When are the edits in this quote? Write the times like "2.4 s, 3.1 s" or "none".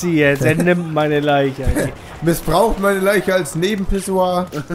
1.6 s